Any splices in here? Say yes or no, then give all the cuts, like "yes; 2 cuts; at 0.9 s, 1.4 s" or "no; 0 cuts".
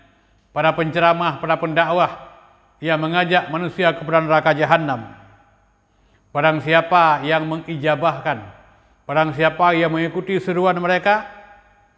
no; 0 cuts